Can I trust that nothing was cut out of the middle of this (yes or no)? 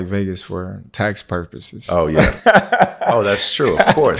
yes